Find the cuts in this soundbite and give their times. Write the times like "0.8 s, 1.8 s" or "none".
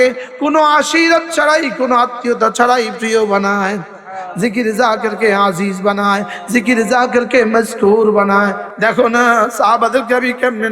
8.7 s

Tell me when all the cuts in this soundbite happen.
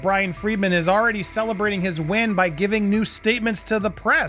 none

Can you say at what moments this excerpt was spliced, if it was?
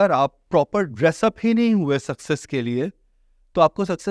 none

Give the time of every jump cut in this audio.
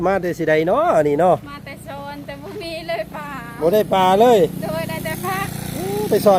none

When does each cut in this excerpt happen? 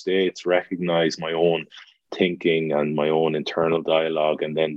2.1 s

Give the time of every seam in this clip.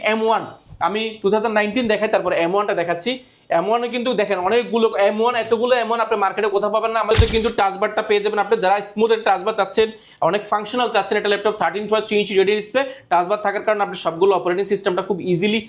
7.1 s

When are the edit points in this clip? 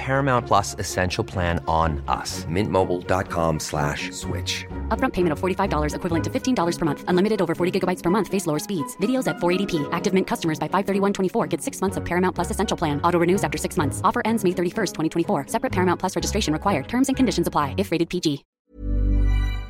18.6 s

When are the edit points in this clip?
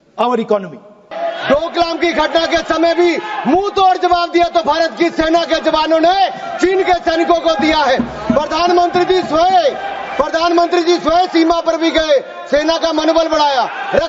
1.1 s

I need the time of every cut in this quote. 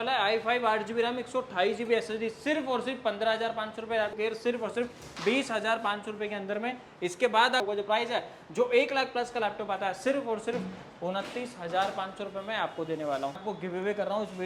4.1 s, 7.6 s, 13.4 s

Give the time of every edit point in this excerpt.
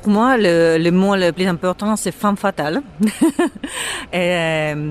1.4 s

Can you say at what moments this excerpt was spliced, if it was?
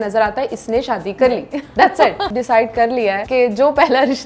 2.3 s, 3.2 s

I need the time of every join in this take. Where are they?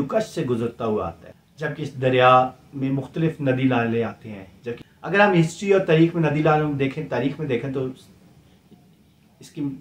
none

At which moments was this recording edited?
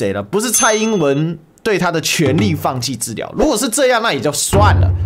none

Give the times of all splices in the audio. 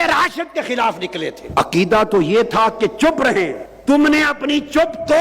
1.4 s, 3.7 s

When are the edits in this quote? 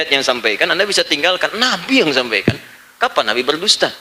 none

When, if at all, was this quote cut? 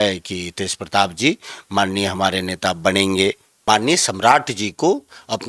3.5 s

